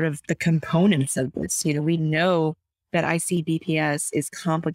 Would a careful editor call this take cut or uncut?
uncut